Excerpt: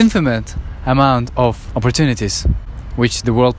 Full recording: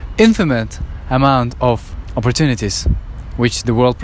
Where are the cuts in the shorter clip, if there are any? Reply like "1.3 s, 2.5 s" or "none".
1.6 s